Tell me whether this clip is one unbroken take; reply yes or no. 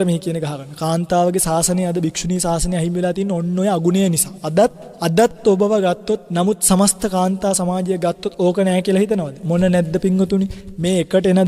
no